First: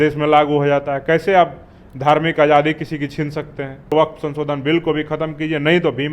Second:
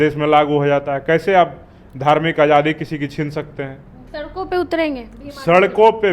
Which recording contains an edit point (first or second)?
first